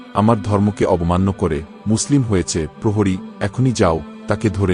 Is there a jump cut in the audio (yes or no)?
no